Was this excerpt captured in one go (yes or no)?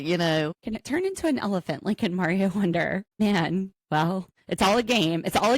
no